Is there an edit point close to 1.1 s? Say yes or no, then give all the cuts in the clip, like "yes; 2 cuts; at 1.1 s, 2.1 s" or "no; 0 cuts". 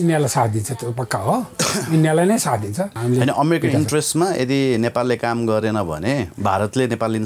no; 2 cuts; at 3.0 s, 6.3 s